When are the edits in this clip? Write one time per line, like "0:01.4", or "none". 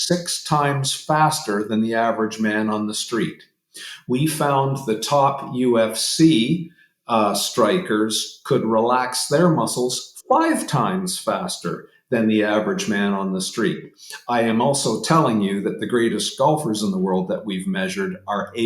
none